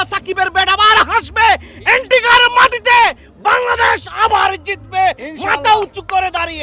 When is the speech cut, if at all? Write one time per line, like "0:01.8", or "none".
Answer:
none